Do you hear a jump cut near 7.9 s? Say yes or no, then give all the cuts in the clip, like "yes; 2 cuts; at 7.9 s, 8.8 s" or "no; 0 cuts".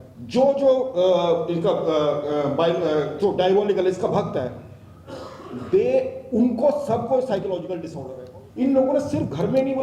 yes; 1 cut; at 7.9 s